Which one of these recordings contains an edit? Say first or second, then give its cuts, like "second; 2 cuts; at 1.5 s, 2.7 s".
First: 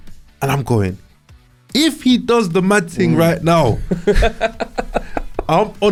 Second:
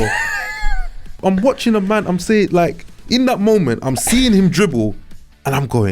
second; 1 cut; at 1.1 s